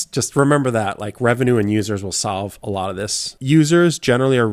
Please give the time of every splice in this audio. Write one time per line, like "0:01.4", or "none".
0:03.3